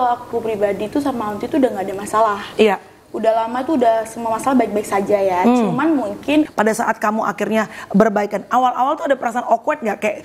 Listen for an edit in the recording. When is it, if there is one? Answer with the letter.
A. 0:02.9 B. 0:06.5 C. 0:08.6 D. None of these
B